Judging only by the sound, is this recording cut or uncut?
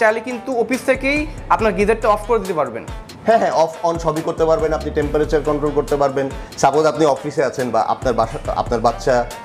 uncut